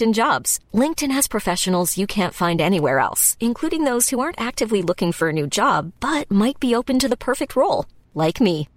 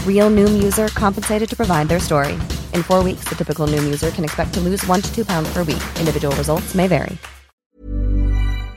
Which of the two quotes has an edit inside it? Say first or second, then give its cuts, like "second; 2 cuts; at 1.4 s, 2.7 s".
second; 1 cut; at 7.8 s